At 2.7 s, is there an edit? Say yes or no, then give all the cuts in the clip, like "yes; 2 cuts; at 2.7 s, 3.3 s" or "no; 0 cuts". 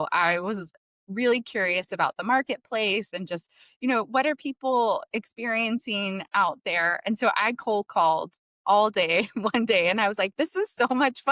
no; 0 cuts